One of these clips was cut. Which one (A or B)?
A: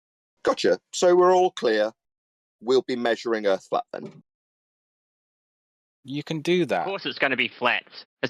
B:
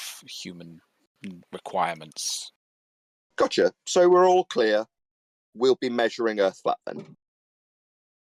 A